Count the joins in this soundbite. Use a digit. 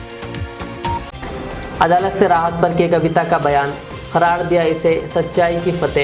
1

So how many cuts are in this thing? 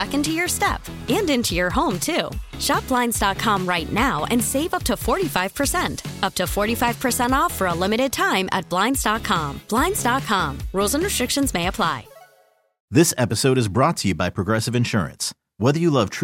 1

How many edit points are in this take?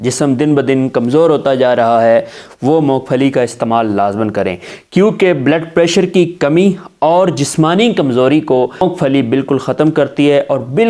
1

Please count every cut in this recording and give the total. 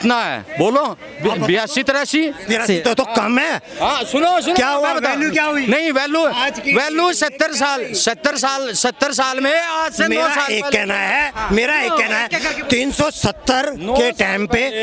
0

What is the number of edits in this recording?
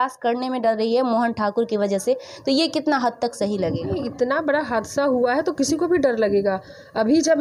0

